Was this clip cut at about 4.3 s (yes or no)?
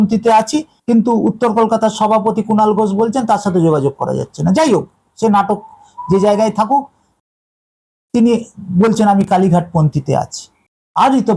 no